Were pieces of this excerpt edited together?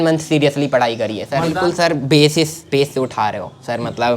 yes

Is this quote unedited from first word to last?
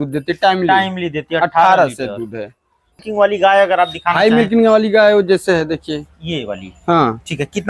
no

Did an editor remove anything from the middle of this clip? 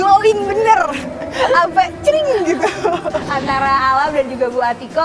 yes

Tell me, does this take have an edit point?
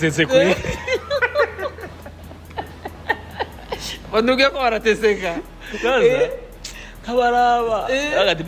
no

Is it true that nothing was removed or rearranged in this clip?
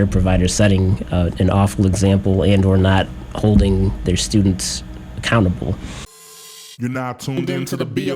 no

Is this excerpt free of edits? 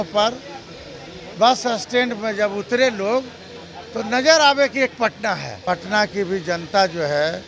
no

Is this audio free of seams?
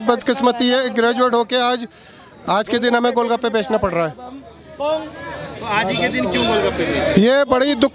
yes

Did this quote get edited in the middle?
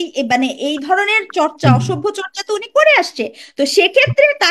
no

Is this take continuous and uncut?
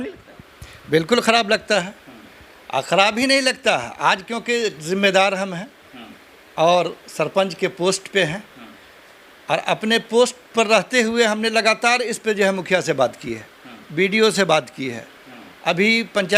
yes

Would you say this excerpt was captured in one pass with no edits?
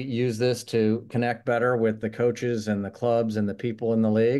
yes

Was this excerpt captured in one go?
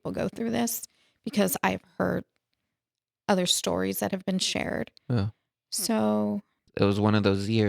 no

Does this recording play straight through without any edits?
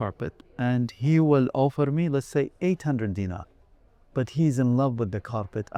yes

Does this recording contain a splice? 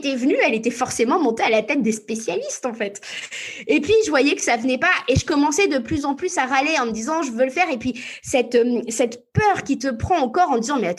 no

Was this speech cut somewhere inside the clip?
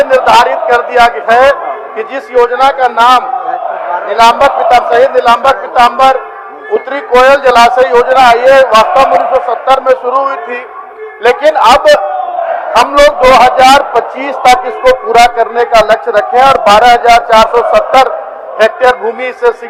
no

